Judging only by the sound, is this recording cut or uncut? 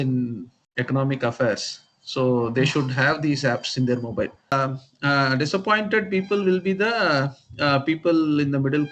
cut